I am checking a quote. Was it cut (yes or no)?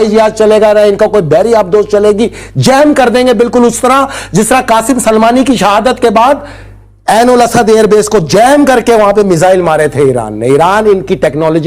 no